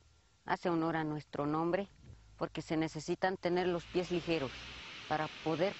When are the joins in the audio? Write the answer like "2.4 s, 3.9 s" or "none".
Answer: 3.0 s